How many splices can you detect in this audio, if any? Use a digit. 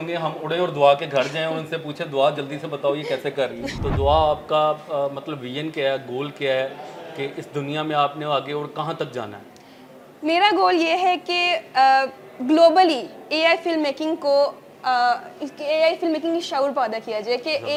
0